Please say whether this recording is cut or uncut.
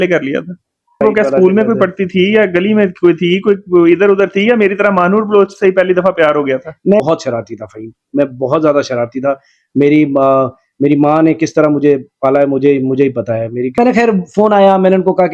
cut